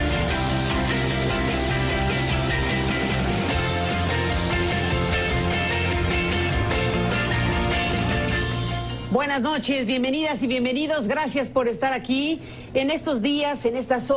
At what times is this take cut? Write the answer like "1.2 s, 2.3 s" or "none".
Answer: none